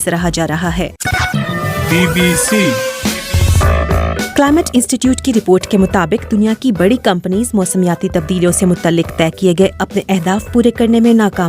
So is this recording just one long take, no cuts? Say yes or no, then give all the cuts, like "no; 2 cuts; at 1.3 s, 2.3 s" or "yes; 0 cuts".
no; 2 cuts; at 1.0 s, 4.1 s